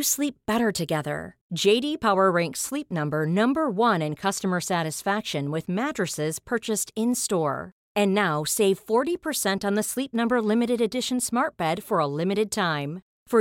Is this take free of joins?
yes; 0 cuts

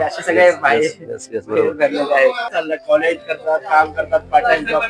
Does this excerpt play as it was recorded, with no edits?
no; 1 cut; at 2.4 s

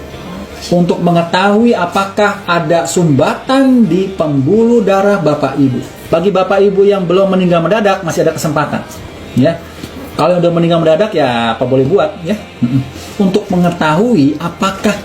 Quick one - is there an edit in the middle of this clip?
yes; 3 cuts; at 6.0 s, 13.1 s, 14.1 s

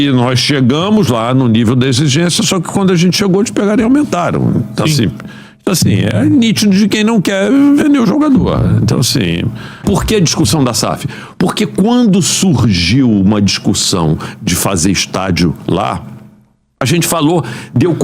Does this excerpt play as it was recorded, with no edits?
no; 1 cut; at 9.8 s

